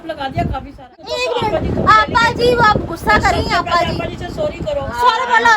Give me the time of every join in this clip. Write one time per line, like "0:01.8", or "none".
0:01.0

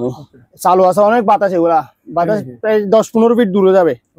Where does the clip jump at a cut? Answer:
none

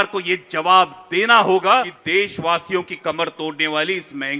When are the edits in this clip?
0:02.0

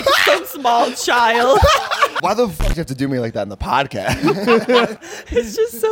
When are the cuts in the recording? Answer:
0:01.8
0:05.0

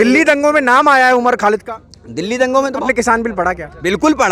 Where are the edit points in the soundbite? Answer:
0:02.8

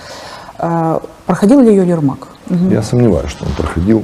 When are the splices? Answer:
0:02.3

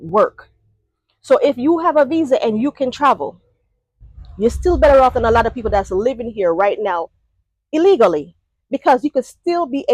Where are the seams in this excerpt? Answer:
none

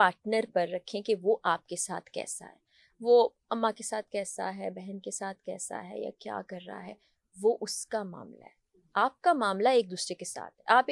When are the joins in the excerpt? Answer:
none

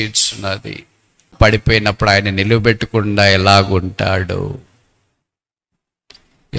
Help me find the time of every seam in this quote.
0:01.3

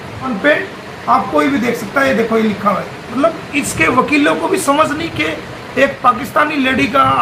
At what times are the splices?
none

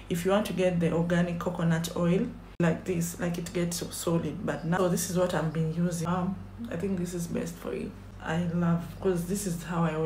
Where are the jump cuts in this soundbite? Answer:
0:02.5
0:04.8
0:06.1
0:08.1

